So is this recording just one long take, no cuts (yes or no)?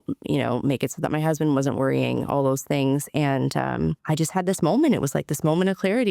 no